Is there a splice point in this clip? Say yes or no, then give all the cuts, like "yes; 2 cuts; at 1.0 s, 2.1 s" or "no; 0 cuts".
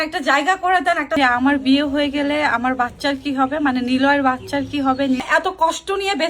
yes; 2 cuts; at 1.1 s, 5.2 s